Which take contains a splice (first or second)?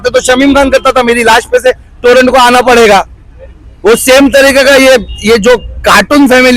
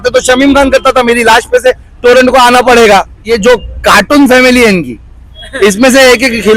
second